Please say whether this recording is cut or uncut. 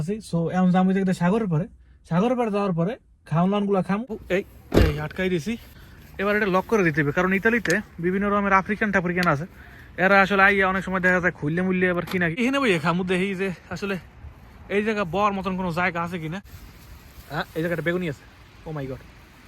cut